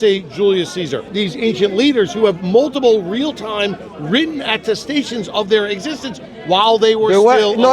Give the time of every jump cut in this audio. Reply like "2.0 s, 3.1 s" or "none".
1.1 s